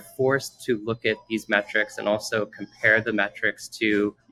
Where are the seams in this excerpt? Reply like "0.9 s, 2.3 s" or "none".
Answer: none